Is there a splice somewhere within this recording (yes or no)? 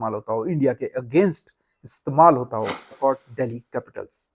yes